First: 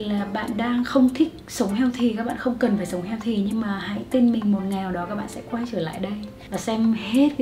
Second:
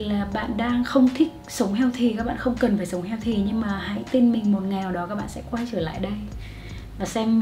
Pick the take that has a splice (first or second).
first